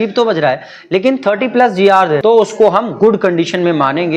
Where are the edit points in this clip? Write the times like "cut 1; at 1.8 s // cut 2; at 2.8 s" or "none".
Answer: cut 1; at 2.2 s